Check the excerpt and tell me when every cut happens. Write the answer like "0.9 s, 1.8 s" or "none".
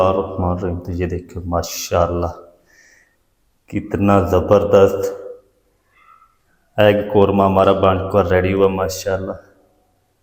none